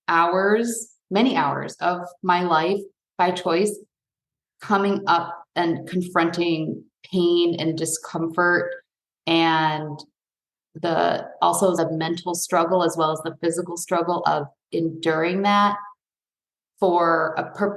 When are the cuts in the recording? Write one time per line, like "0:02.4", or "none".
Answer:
none